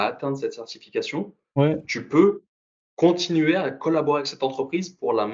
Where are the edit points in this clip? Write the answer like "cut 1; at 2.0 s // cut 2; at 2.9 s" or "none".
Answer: none